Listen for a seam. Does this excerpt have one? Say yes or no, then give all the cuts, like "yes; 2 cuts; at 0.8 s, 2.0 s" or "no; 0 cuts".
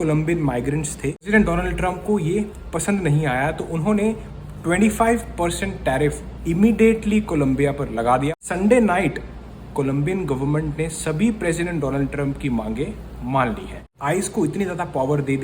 yes; 3 cuts; at 1.3 s, 8.3 s, 13.9 s